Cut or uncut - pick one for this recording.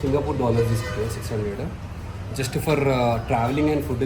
uncut